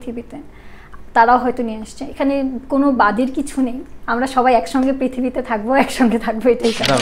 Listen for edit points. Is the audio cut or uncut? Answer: uncut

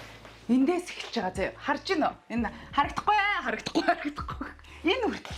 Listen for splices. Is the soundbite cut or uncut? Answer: uncut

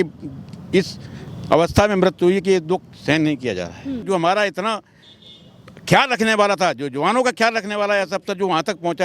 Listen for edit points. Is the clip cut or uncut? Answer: cut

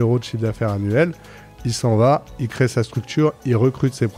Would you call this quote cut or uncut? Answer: uncut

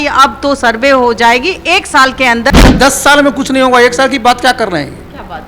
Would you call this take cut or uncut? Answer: cut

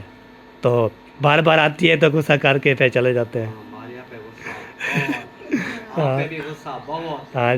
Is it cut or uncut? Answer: uncut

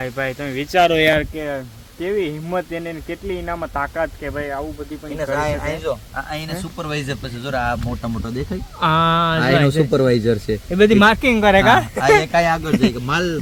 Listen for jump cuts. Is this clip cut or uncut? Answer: uncut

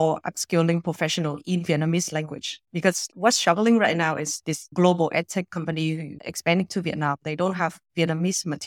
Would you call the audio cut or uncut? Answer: uncut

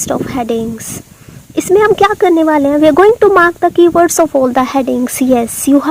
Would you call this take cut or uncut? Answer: uncut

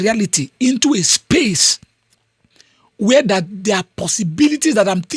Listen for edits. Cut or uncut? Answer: uncut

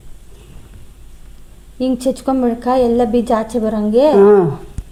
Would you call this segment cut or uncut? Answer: uncut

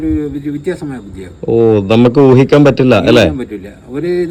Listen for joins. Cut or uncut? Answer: uncut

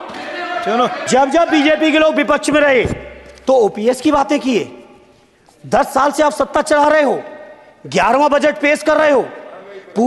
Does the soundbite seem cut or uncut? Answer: cut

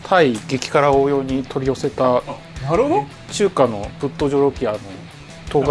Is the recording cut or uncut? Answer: uncut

